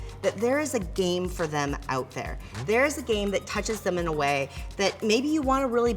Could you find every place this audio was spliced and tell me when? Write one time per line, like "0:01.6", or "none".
none